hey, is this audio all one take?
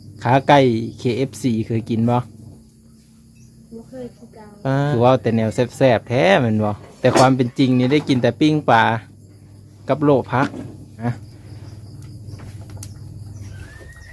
no; 3 cuts; at 4.9 s, 6.8 s, 11.1 s

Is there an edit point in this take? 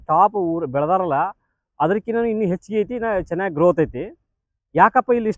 no; 0 cuts

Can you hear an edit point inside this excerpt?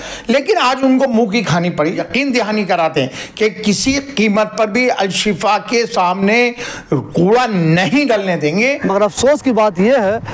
yes; 2 cuts; at 2.0 s, 8.8 s

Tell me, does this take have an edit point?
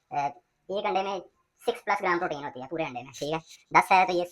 no; 0 cuts

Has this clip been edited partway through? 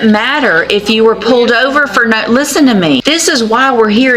yes; 1 cut; at 3.0 s

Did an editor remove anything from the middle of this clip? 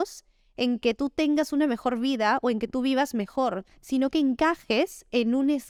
no; 0 cuts

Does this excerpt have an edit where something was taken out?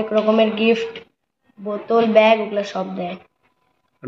no; 0 cuts

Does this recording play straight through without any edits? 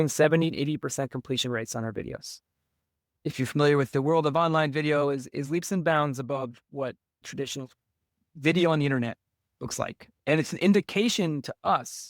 yes; 0 cuts

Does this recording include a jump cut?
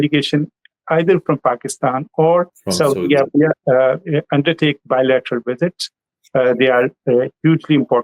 yes; 1 cut; at 2.6 s

